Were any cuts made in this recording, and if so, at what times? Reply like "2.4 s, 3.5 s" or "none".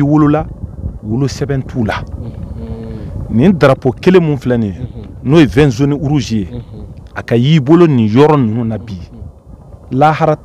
none

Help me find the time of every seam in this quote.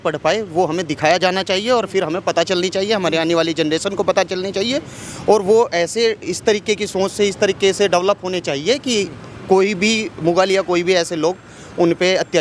none

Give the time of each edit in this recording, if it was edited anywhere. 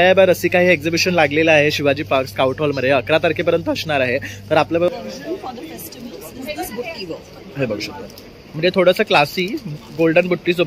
4.9 s

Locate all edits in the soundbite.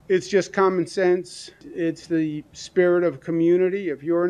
1.6 s

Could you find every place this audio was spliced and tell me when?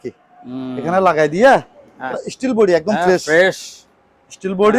2.1 s

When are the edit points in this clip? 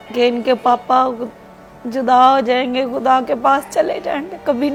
none

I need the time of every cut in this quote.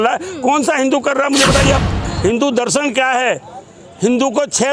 2.1 s

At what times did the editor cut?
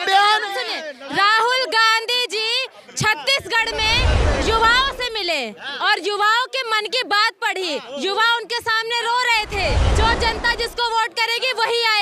9.9 s

